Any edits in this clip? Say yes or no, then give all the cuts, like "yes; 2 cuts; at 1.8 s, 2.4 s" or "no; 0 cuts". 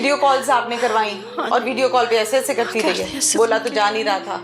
no; 0 cuts